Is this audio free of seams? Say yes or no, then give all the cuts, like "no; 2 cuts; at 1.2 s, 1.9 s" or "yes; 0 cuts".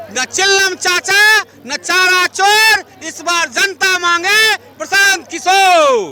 yes; 0 cuts